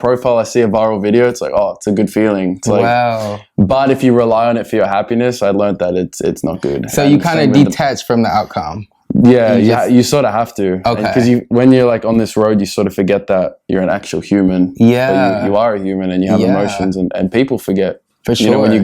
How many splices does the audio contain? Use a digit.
1